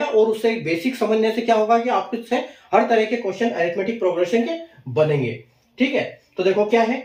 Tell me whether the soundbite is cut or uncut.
uncut